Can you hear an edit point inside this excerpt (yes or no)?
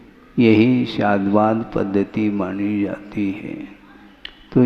no